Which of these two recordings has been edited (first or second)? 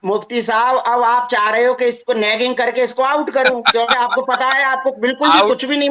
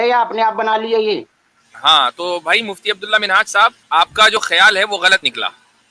second